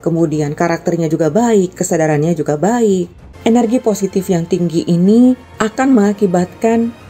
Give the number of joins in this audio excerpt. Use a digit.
1